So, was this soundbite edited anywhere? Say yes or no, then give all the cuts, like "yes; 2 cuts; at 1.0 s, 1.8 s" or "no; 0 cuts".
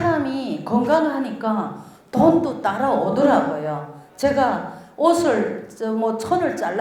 no; 0 cuts